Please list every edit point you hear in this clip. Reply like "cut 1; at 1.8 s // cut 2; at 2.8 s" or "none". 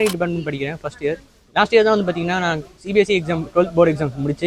none